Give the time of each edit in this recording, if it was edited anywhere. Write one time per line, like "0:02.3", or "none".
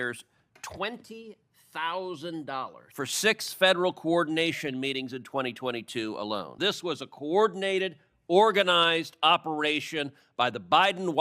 0:02.8
0:06.5